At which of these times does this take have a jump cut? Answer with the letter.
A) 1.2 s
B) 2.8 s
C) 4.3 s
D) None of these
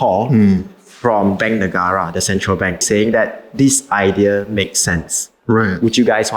B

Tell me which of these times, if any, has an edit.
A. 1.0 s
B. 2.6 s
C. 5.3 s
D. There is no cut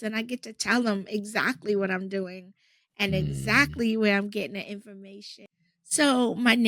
C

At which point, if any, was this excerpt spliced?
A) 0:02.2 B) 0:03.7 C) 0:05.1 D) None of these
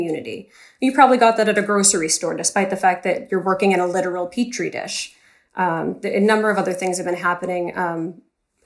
D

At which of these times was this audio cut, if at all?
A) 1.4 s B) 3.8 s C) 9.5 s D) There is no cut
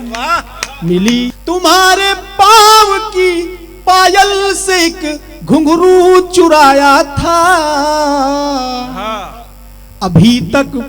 A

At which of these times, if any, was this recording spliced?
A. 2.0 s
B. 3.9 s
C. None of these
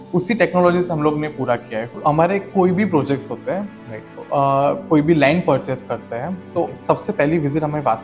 A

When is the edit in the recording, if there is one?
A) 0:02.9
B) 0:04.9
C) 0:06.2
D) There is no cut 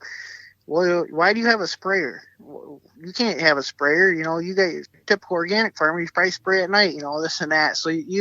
B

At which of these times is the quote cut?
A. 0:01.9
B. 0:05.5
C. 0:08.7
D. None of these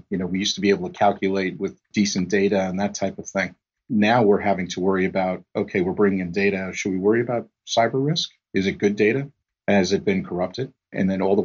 A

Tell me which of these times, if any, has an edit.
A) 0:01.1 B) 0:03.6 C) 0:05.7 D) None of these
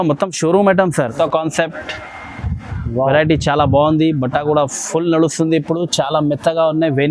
A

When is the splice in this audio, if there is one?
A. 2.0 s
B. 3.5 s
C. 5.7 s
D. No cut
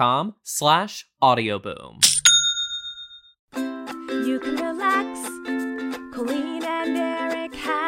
B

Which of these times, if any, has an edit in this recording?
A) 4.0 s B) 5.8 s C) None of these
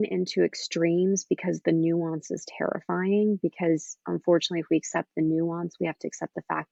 C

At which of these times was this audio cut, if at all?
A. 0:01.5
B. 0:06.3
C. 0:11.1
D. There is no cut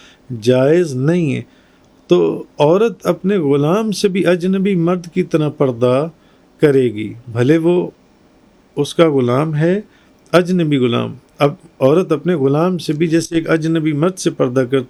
D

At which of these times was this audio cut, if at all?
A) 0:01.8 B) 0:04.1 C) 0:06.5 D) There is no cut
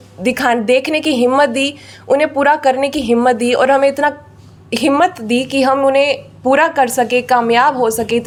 D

